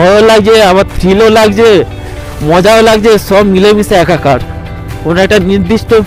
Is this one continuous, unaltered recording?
yes; 0 cuts

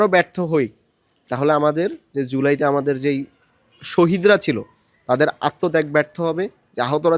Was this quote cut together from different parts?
no; 0 cuts

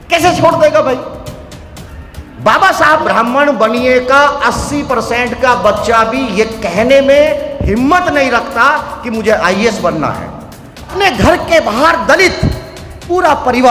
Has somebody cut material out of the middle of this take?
yes; 2 cuts; at 3.0 s, 10.9 s

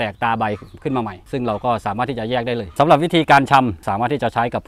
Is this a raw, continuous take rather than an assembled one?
no; 1 cut; at 2.7 s

